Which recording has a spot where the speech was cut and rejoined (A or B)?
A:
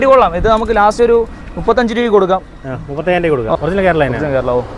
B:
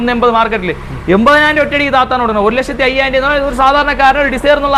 A